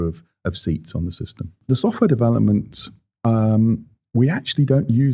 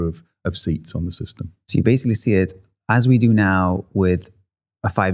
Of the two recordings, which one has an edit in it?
first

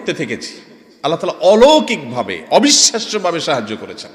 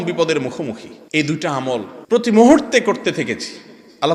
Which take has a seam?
second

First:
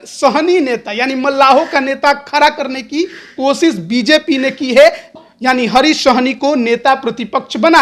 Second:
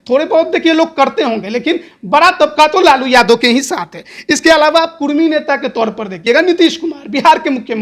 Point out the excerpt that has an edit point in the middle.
first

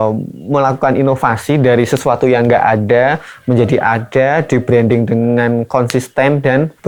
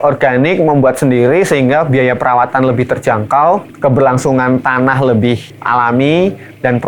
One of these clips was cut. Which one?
second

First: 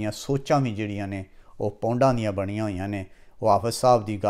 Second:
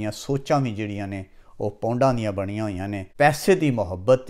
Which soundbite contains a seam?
second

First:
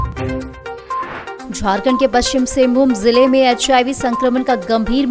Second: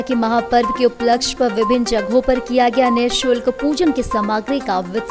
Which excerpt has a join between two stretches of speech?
first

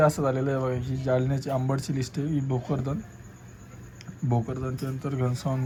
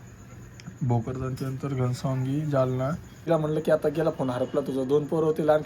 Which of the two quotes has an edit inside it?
second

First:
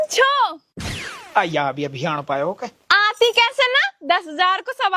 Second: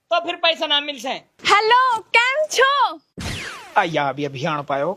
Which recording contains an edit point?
second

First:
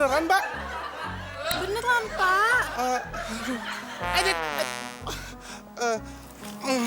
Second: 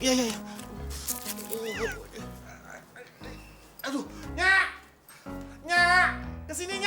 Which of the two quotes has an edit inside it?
second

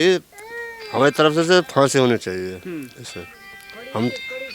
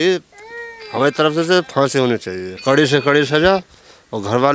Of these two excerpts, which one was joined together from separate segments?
second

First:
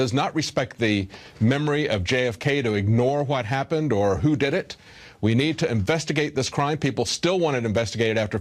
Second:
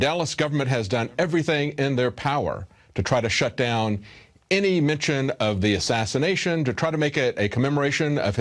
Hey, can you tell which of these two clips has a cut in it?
second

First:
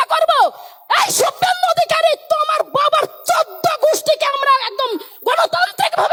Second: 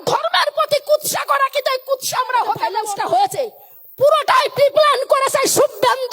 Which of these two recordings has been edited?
second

